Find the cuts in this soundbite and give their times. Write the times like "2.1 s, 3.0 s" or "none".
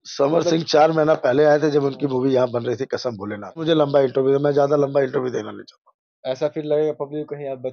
3.6 s